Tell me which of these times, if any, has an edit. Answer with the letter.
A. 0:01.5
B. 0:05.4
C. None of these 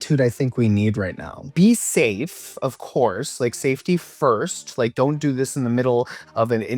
A